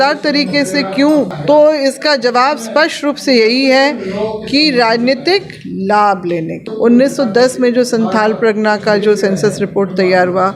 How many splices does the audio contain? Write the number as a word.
two